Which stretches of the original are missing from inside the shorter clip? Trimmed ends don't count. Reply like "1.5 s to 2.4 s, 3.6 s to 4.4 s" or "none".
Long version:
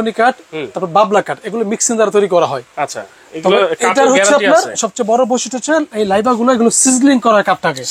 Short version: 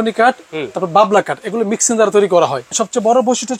2.7 s to 4.7 s